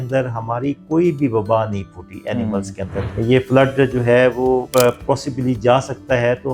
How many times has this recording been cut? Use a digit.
2